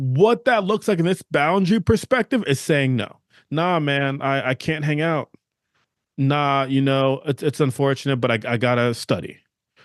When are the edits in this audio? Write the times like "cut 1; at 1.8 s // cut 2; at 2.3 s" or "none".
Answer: none